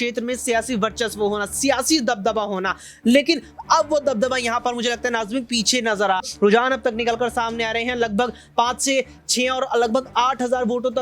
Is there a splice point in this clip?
yes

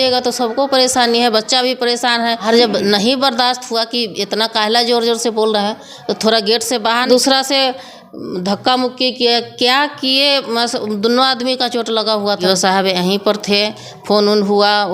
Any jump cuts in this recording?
yes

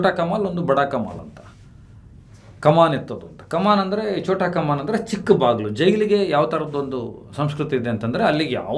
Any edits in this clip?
no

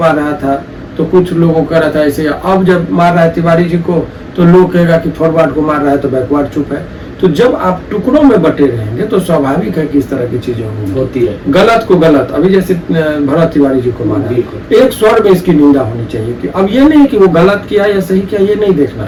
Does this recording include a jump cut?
no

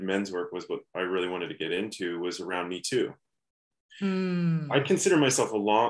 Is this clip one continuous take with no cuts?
yes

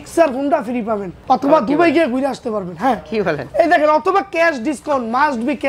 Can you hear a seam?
yes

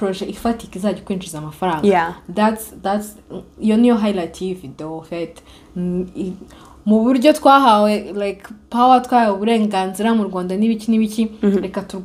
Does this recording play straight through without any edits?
yes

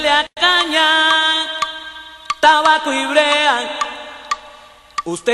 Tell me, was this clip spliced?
no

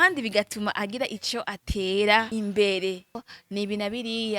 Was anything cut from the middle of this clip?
yes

